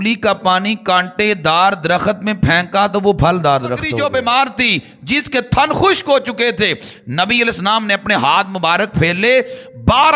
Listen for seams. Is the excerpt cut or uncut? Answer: cut